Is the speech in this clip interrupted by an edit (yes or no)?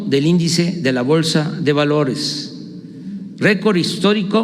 yes